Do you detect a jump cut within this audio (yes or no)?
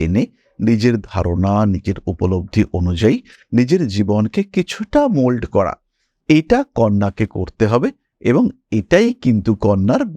no